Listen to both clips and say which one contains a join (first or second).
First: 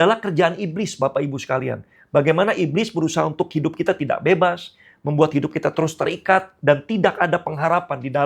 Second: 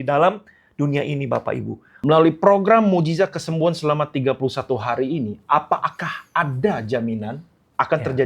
second